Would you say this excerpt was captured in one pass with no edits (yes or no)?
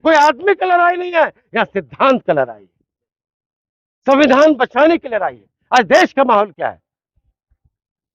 yes